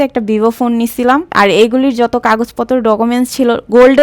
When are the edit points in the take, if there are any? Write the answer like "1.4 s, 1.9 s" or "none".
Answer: 1.3 s